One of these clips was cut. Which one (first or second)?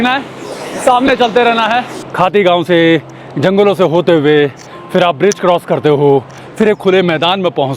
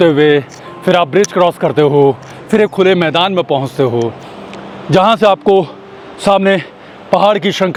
first